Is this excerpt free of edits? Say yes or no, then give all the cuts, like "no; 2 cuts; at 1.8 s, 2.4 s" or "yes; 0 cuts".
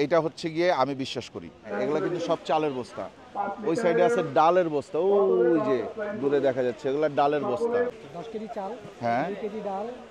no; 2 cuts; at 1.7 s, 7.9 s